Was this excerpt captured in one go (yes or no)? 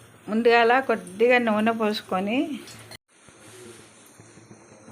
no